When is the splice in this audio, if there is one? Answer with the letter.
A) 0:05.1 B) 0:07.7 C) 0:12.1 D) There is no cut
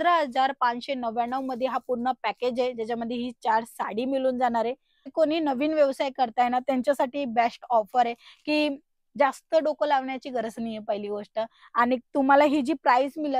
A